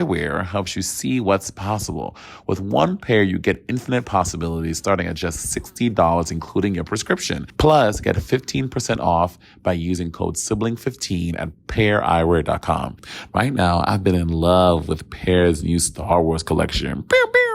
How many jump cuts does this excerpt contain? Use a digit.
2